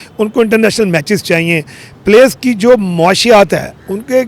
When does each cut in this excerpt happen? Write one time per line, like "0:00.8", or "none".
none